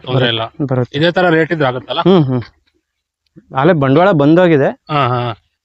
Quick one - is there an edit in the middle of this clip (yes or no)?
no